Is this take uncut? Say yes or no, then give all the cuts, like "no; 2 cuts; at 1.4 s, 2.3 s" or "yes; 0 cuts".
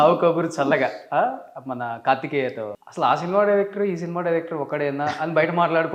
yes; 0 cuts